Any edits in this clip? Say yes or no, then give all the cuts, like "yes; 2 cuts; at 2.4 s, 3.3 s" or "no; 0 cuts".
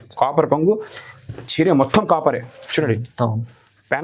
no; 0 cuts